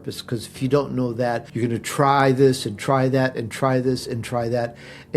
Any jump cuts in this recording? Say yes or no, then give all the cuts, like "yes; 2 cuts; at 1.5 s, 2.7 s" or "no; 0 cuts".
yes; 1 cut; at 1.5 s